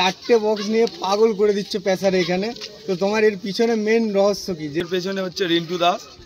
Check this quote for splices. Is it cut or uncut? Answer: cut